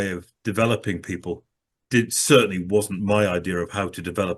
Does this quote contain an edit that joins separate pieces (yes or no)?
no